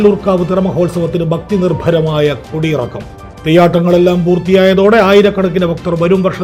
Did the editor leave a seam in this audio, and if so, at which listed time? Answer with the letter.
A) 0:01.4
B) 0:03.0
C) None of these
C